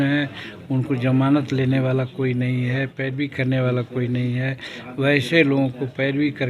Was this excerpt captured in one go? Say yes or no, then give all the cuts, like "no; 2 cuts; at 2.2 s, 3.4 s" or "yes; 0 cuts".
yes; 0 cuts